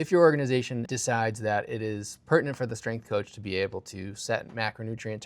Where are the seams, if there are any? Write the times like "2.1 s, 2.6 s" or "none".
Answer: 0.9 s